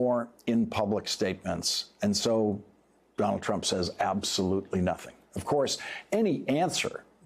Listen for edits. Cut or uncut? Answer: cut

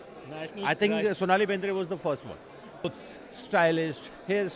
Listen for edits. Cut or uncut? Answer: cut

